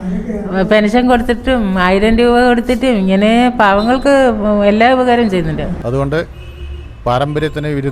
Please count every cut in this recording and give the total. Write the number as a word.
one